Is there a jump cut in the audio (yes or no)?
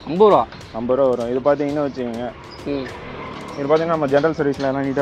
no